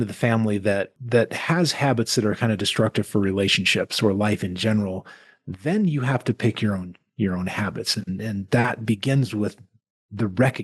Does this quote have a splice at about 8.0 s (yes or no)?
no